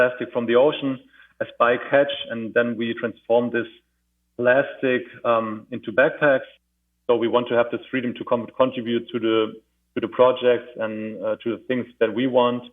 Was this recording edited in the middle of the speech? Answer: yes; 1 cut; at 6.7 s

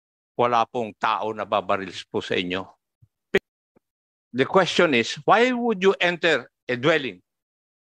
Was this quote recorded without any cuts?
no; 1 cut; at 3.3 s

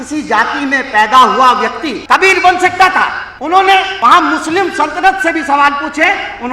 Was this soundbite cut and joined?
yes; 3 cuts; at 1.9 s, 3.3 s, 3.9 s

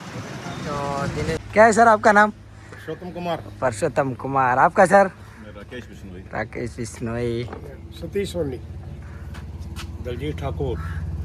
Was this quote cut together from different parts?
yes; 1 cut; at 1.3 s

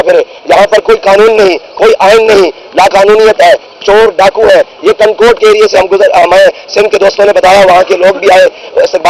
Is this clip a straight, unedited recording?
yes; 0 cuts

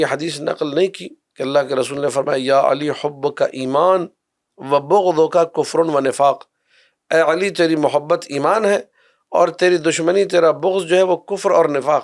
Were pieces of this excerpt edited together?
no; 0 cuts

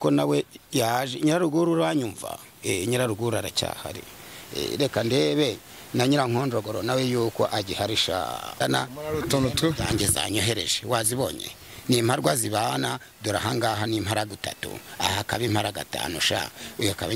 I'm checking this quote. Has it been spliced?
yes; 1 cut; at 8.6 s

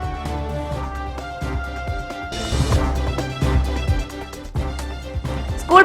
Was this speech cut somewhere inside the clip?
yes; 1 cut; at 4.8 s

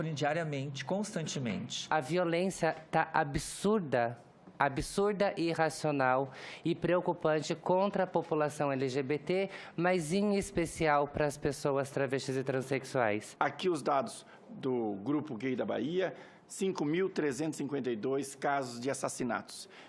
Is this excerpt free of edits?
no; 2 cuts; at 1.8 s, 13.3 s

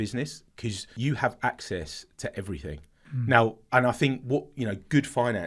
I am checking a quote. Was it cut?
yes; 2 cuts; at 0.9 s, 2.9 s

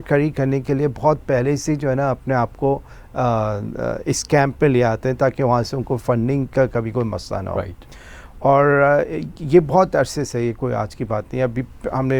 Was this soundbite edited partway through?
no; 0 cuts

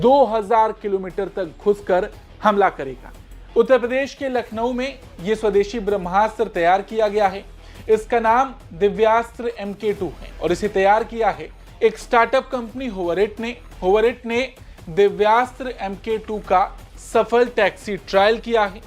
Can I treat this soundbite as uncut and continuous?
yes; 0 cuts

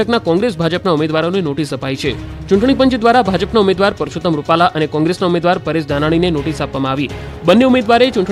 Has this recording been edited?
no; 0 cuts

